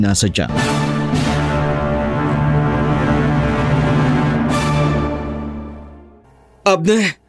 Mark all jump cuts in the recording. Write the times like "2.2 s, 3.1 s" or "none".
6.3 s